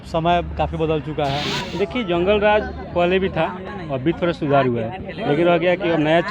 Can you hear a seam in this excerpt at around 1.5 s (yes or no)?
yes